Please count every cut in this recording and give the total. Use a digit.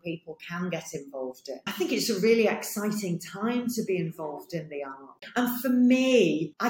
1